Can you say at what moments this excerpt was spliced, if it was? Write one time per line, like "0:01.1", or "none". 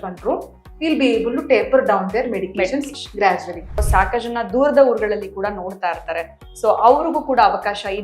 0:03.8